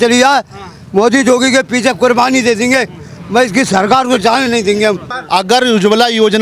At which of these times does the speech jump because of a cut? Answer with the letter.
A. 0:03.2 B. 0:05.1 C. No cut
B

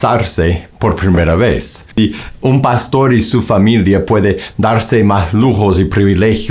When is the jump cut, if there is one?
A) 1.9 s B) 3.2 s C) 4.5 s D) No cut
A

